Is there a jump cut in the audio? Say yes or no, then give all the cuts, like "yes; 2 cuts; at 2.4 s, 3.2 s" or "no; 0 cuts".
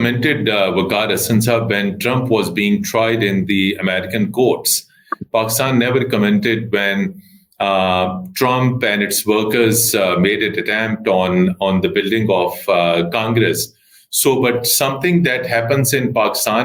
no; 0 cuts